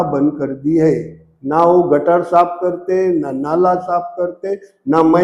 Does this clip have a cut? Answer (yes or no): no